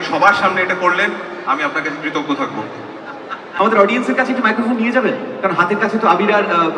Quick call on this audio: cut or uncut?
cut